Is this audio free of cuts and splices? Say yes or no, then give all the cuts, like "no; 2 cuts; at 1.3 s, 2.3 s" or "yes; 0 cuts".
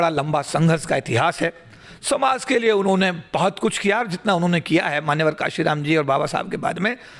yes; 0 cuts